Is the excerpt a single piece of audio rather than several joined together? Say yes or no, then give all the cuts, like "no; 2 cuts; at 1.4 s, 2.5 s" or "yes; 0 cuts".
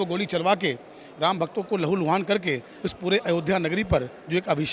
yes; 0 cuts